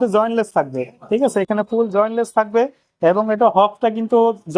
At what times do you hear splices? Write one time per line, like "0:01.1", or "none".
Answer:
none

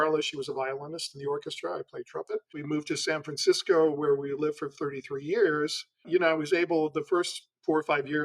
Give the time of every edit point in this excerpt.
0:02.5
0:06.0

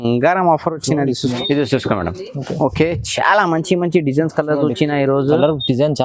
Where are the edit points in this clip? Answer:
0:01.2

